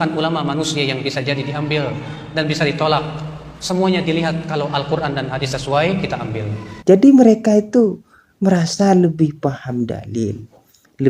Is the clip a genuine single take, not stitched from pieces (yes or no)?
no